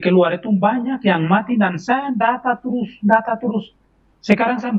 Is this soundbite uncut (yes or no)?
yes